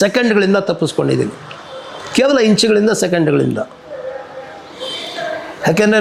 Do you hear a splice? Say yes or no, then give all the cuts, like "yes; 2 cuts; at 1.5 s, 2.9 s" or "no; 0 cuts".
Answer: no; 0 cuts